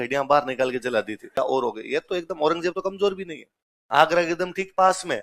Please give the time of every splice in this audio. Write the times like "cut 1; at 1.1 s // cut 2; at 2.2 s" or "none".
cut 1; at 1.4 s